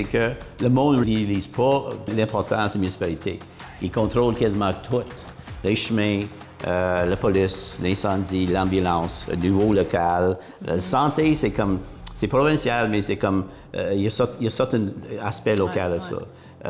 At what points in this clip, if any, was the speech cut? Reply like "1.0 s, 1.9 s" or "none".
1.0 s, 2.1 s